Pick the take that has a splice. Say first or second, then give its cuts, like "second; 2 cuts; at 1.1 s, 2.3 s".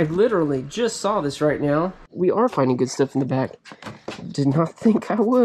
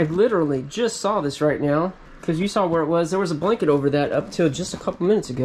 first; 1 cut; at 2.1 s